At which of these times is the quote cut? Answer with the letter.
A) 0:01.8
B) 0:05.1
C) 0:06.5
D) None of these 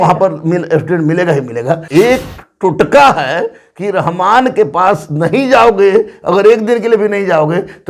A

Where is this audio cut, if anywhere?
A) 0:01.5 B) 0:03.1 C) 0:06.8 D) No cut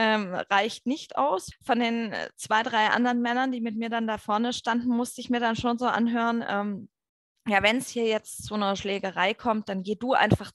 A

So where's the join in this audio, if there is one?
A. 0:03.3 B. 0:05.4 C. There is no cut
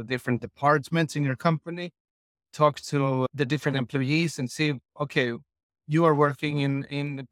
A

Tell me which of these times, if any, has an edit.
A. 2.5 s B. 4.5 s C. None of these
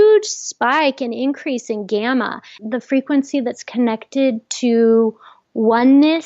A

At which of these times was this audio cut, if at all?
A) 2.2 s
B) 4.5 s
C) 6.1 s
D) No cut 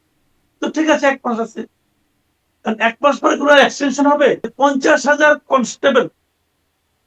B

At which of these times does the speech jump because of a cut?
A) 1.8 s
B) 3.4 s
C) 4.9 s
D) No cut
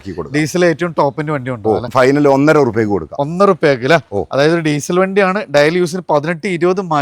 A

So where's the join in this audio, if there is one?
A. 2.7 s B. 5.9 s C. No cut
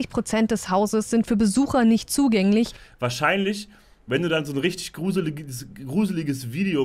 C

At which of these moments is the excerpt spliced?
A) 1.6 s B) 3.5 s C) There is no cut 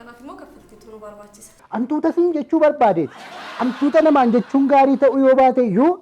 A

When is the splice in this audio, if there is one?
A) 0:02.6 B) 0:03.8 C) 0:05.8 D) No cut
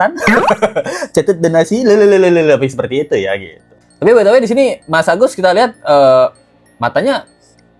D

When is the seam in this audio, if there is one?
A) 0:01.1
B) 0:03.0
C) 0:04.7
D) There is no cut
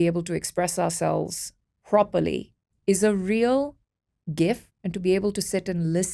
C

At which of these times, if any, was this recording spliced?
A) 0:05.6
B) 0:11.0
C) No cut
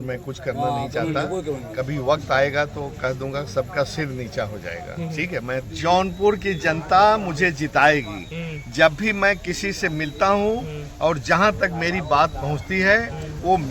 A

